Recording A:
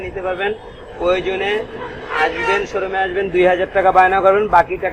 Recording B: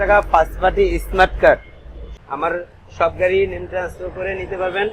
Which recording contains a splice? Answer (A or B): B